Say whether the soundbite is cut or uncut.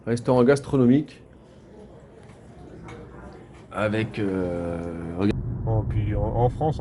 cut